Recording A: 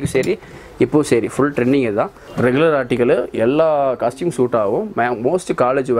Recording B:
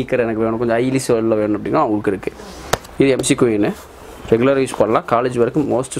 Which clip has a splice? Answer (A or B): A